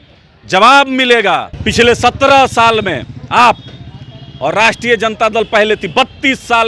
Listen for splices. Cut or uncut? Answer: cut